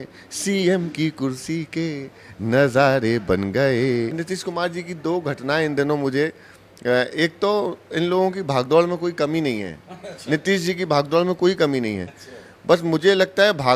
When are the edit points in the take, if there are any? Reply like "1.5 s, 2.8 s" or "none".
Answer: 4.2 s